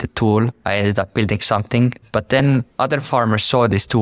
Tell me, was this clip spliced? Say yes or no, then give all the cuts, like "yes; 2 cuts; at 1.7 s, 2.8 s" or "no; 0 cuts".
yes; 1 cut; at 2.4 s